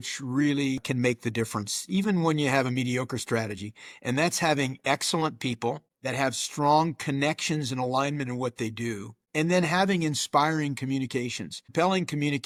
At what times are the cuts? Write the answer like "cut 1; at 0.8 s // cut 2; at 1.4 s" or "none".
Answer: none